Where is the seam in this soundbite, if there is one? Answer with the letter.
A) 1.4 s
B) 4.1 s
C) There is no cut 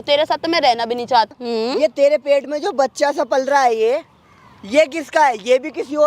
A